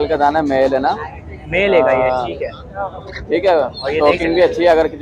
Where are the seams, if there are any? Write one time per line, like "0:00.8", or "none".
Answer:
none